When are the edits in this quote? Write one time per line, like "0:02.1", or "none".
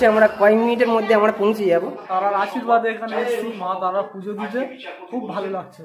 0:02.1